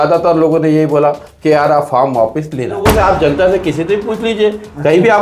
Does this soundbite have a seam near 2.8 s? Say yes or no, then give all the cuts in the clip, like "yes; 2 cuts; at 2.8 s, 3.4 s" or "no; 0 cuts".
yes; 1 cut; at 2.8 s